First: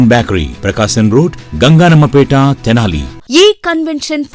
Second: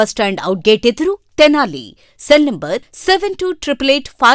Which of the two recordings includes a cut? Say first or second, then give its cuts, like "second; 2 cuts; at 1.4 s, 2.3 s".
first; 1 cut; at 3.1 s